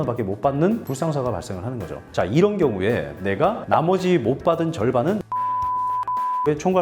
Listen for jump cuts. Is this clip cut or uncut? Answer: uncut